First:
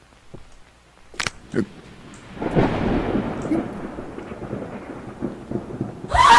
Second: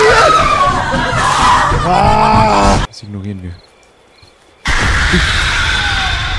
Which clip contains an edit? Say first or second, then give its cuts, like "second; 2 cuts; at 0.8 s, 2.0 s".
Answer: second; 1 cut; at 2.8 s